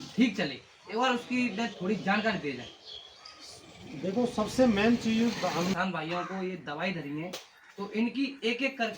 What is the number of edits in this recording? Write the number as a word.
one